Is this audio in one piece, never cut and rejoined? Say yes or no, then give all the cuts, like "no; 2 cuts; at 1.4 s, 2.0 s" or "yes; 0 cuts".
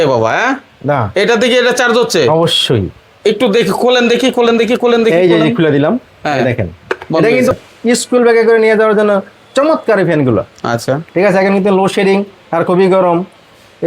no; 1 cut; at 7.5 s